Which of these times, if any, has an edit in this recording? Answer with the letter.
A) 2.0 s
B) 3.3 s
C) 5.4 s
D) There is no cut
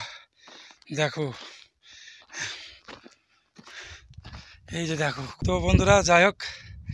C